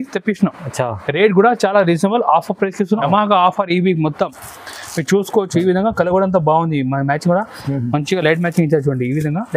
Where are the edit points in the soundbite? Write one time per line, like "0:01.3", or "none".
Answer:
0:03.0